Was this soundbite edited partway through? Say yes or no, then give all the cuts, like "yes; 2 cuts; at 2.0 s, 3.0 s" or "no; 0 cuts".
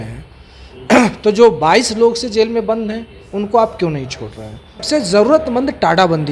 yes; 1 cut; at 4.8 s